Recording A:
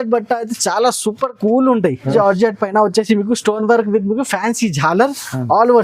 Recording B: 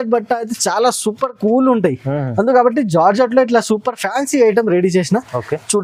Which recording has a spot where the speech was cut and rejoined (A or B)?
A